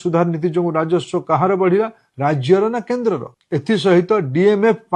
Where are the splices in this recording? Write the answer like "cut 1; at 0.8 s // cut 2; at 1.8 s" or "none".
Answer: cut 1; at 3.3 s